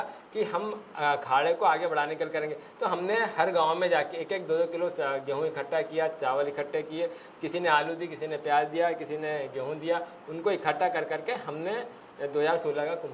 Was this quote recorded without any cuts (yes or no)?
yes